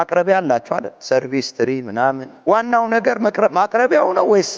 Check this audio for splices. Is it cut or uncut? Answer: cut